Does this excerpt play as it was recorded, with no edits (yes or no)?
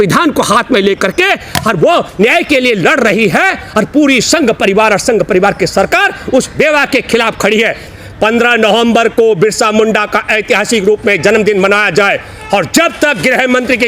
no